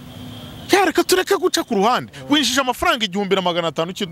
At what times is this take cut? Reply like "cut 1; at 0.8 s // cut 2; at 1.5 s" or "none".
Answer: none